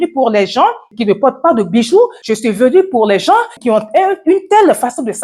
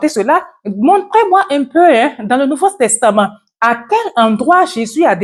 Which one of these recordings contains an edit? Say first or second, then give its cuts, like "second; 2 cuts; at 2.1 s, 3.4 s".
first; 3 cuts; at 0.9 s, 2.2 s, 3.5 s